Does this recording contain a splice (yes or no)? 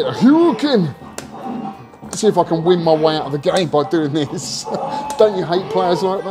no